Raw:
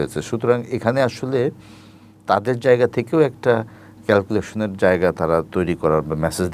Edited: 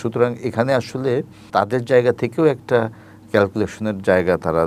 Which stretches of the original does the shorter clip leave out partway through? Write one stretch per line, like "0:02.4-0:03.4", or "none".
0:01.6-0:02.1